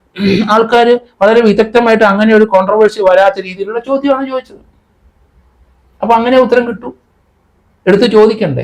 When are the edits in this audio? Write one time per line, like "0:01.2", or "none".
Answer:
none